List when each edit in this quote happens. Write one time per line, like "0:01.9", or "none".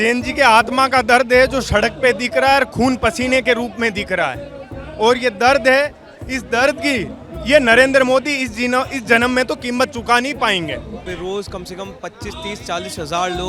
0:11.0